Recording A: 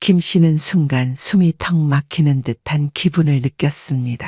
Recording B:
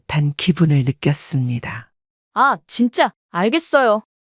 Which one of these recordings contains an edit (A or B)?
B